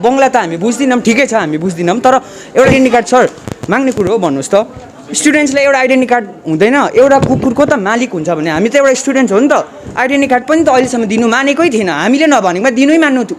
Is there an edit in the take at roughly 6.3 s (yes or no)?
no